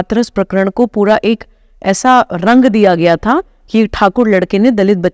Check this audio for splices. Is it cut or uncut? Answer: uncut